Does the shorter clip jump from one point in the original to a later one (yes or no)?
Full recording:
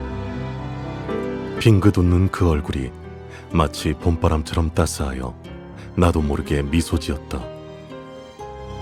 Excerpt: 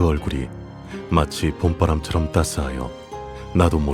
no